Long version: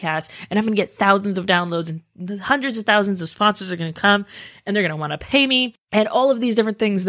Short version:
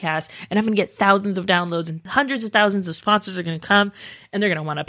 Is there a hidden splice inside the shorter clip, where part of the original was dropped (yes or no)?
yes